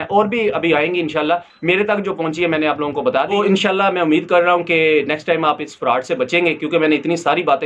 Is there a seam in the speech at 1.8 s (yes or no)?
no